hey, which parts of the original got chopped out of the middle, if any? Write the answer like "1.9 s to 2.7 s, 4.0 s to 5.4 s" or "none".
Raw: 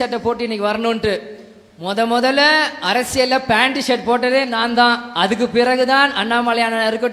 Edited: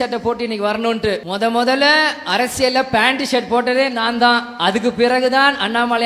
1.3 s to 1.8 s